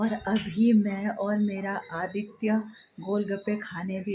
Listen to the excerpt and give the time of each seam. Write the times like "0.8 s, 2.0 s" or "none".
none